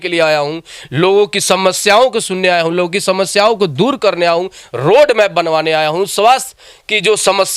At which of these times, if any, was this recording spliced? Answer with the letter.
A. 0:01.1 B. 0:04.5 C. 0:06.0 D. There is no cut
D